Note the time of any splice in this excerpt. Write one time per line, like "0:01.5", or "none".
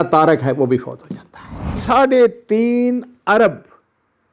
0:01.8